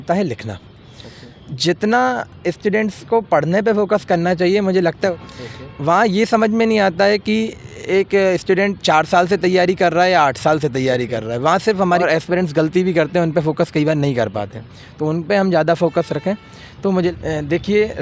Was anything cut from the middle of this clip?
yes; 3 cuts; at 5.2 s, 12.0 s, 17.1 s

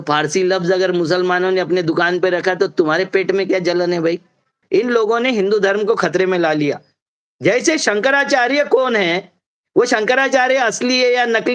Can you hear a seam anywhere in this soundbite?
yes; 1 cut; at 4.5 s

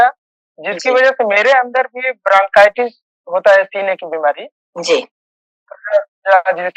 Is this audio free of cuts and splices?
yes; 0 cuts

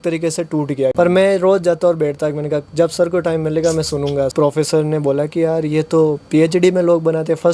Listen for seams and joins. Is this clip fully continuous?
no; 2 cuts; at 0.9 s, 4.3 s

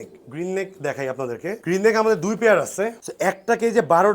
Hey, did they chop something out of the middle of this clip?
yes; 1 cut; at 3.0 s

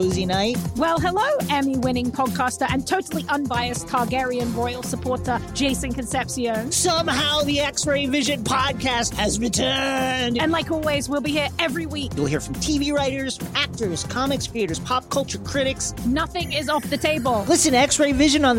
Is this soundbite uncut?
yes; 0 cuts

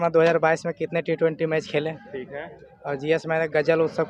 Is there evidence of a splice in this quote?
no; 0 cuts

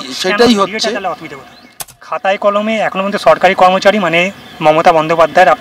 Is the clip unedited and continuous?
no; 1 cut; at 2.1 s

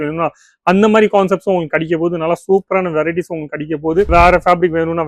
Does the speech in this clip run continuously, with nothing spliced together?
no; 1 cut; at 4.1 s

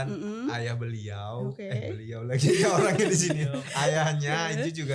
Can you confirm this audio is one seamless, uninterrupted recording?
yes; 0 cuts

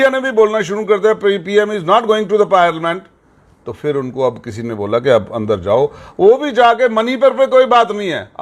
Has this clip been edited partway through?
no; 0 cuts

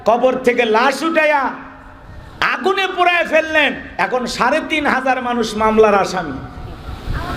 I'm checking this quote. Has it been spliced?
no; 0 cuts

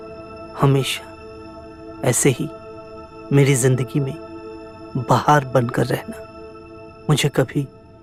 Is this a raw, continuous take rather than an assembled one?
yes; 0 cuts

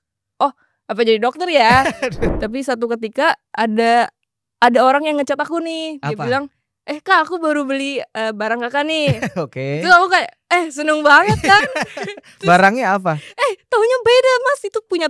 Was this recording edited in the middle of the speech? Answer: yes; 1 cut; at 2.3 s

